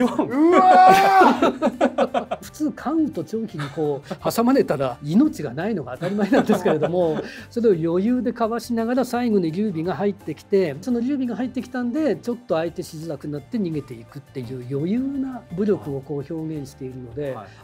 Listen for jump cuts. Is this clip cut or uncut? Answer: cut